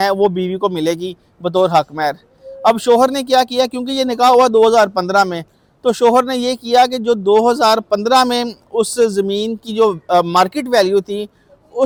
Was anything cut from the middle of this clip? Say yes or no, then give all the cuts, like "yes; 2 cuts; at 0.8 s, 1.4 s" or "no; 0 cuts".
no; 0 cuts